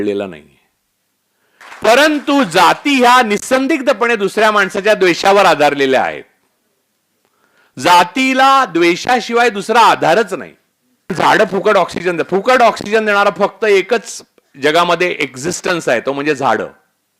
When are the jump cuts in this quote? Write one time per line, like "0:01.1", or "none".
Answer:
0:01.6
0:11.1